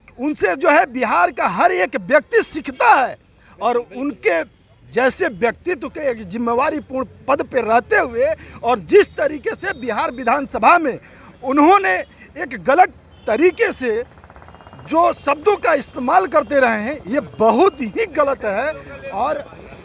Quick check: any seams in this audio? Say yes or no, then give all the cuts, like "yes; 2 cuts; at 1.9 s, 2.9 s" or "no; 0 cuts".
no; 0 cuts